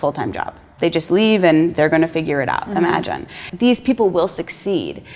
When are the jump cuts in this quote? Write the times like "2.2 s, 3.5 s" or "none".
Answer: 3.5 s